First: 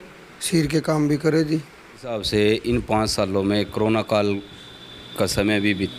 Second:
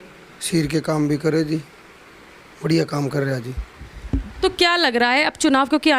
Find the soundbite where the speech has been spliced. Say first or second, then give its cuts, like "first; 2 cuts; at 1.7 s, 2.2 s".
first; 1 cut; at 2.2 s